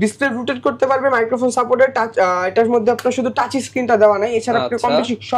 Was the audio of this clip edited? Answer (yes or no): no